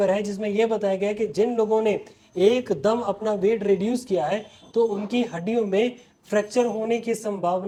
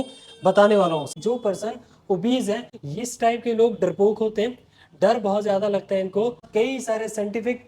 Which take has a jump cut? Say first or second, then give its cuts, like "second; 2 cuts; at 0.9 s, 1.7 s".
second; 3 cuts; at 1.1 s, 2.7 s, 6.4 s